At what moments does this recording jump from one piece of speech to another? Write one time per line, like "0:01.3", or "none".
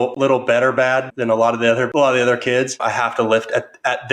0:01.9
0:02.7